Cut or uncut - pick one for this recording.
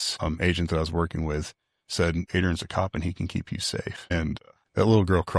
cut